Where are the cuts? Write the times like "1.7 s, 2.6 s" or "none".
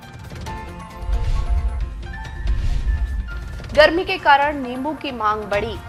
none